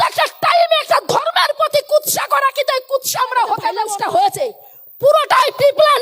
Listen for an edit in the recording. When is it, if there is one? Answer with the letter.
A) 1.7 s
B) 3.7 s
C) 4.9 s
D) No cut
B